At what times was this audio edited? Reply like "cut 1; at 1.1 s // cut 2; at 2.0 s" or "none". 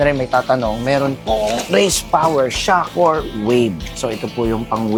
none